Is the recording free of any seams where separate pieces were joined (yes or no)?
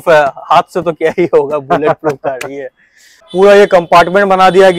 no